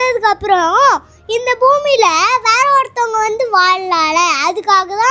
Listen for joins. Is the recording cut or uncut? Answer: uncut